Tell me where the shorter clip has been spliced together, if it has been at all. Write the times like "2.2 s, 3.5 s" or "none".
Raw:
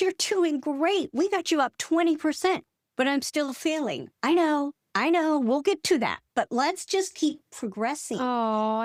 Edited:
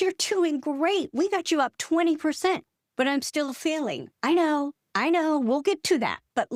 none